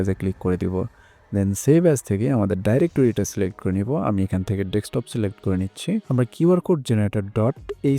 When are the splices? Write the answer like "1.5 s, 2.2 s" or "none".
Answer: 6.1 s